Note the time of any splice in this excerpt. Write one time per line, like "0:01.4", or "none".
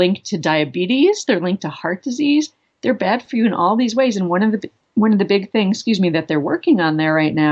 0:04.7